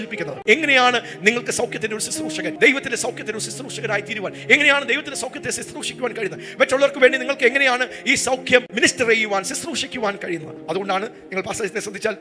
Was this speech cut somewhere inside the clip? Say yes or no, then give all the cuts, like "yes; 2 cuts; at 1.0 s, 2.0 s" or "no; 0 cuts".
no; 0 cuts